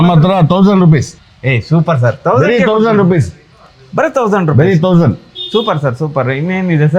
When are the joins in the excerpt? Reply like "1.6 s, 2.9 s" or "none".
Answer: none